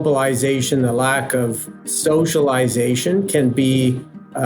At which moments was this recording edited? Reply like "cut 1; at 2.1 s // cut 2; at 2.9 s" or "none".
cut 1; at 1.9 s